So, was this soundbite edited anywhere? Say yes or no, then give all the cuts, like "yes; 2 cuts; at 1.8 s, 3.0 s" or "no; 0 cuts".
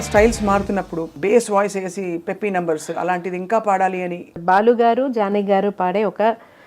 yes; 2 cuts; at 1.0 s, 4.3 s